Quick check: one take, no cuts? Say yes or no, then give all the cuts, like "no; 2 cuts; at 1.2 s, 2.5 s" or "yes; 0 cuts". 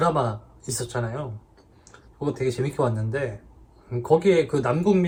yes; 0 cuts